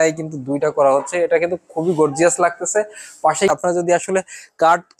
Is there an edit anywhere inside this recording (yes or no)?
yes